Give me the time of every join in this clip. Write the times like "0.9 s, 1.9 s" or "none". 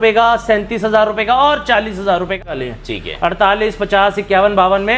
2.4 s